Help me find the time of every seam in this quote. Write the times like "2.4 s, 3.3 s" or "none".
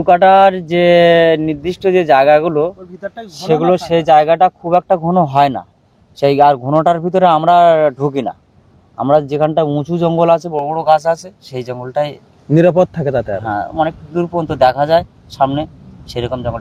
none